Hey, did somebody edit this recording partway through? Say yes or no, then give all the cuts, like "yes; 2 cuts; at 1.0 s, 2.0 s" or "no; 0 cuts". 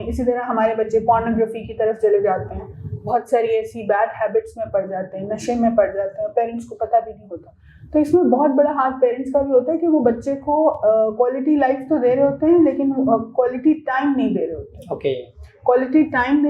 no; 0 cuts